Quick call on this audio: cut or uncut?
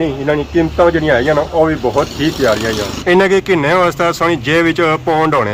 uncut